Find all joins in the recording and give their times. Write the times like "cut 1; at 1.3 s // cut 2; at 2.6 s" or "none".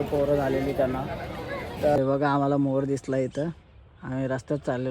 cut 1; at 2.0 s